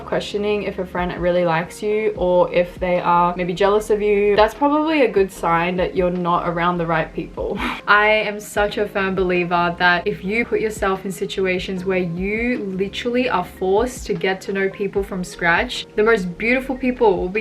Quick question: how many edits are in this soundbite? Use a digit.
2